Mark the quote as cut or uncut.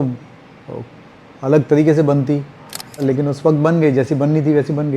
cut